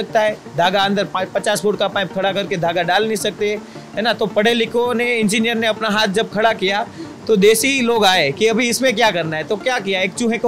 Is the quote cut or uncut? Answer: uncut